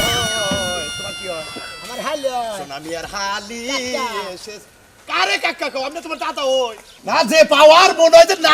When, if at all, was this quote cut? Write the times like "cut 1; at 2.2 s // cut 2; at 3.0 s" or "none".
cut 1; at 6.7 s